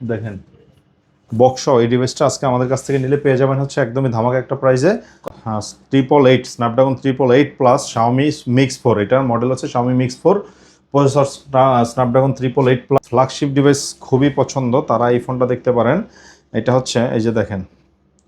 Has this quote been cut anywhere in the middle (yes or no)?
yes